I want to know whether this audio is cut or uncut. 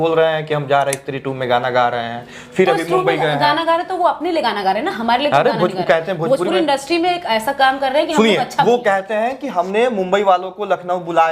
uncut